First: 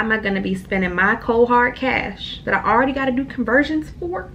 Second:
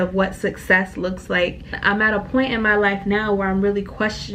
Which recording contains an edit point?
second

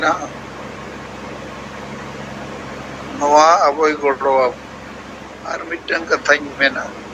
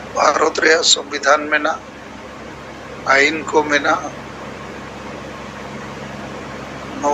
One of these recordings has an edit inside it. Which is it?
first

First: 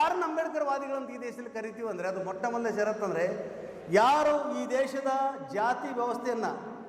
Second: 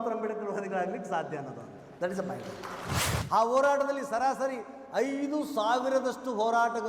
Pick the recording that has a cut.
second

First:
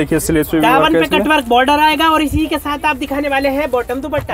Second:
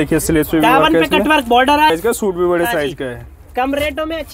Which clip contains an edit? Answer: second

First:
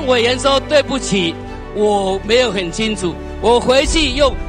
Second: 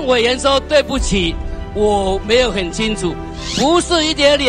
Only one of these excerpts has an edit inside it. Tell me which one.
second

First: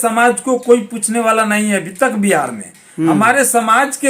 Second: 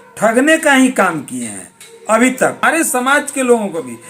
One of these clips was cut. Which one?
second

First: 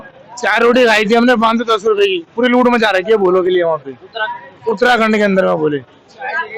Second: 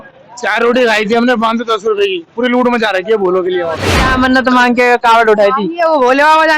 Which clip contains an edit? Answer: second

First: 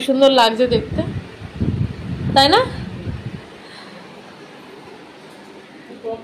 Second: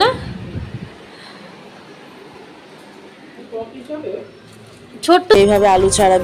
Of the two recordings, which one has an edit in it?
second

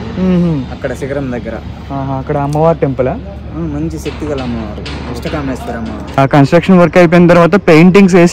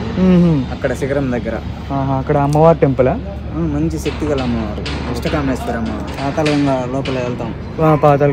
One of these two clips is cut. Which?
first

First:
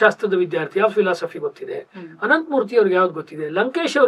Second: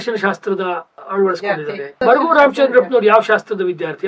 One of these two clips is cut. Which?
second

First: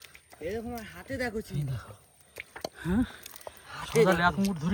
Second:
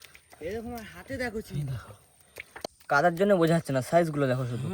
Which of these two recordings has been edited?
second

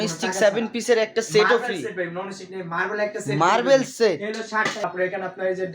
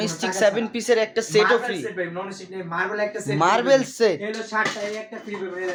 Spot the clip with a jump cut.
first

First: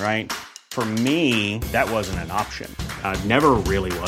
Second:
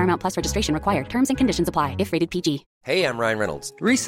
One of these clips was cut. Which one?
second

